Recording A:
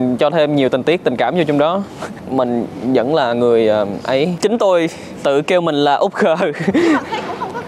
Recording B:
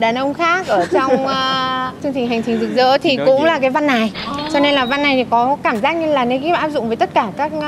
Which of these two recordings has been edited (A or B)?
A